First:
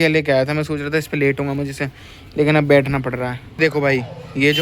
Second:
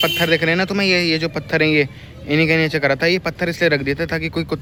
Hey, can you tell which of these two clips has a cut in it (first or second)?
first